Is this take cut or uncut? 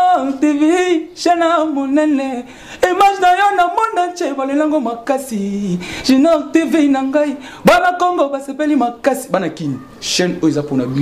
uncut